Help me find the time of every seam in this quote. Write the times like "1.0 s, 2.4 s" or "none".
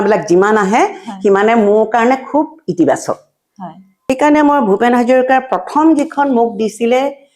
3.9 s